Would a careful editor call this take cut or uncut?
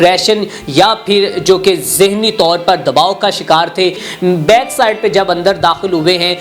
cut